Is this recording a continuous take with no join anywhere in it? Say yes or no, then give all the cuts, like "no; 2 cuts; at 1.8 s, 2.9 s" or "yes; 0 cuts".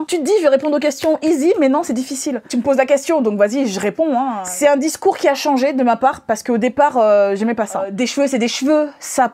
no; 3 cuts; at 2.3 s, 4.4 s, 7.9 s